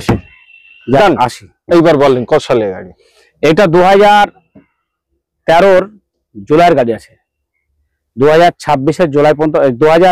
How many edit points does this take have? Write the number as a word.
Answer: zero